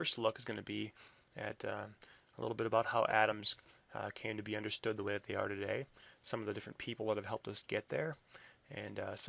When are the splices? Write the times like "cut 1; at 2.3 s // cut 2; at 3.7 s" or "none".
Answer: none

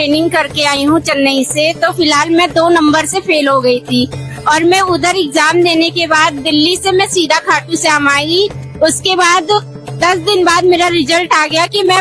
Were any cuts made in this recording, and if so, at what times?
none

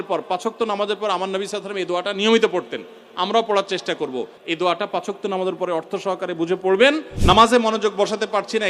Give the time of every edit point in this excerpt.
cut 1; at 4.4 s // cut 2; at 7.1 s

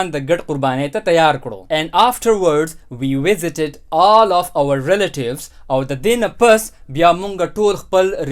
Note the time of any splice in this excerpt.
cut 1; at 1.5 s

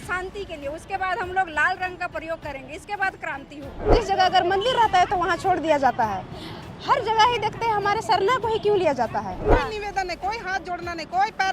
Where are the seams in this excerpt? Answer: cut 1; at 3.9 s // cut 2; at 9.5 s

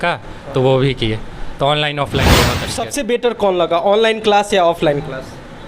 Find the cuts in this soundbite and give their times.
cut 1; at 2.4 s

